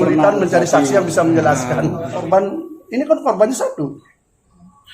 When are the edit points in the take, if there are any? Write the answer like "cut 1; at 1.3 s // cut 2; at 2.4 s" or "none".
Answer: cut 1; at 2.2 s